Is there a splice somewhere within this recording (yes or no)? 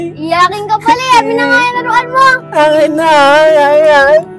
no